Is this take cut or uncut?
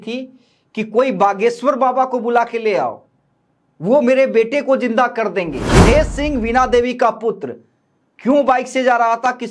cut